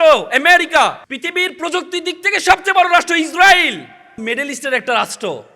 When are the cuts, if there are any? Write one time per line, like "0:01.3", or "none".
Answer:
0:01.1
0:04.2